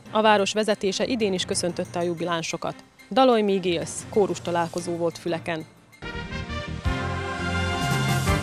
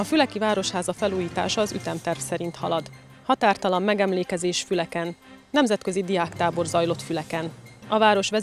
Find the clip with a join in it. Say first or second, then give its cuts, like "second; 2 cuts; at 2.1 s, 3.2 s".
first; 1 cut; at 5.7 s